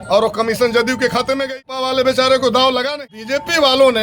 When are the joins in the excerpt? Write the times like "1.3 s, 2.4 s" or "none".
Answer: 1.7 s, 3.0 s